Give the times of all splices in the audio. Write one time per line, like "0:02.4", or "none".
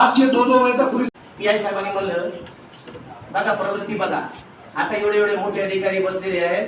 0:01.1